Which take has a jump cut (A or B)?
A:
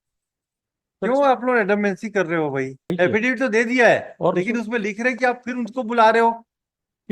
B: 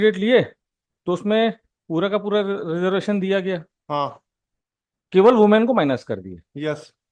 A